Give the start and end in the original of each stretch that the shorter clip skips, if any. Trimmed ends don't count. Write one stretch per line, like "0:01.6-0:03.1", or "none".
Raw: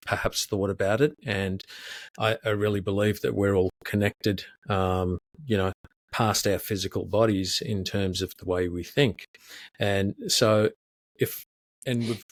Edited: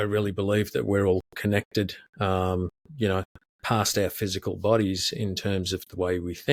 none